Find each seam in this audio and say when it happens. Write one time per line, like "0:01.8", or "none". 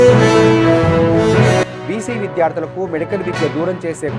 0:01.7